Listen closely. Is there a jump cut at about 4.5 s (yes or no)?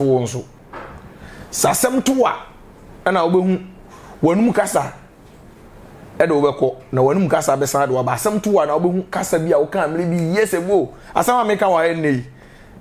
no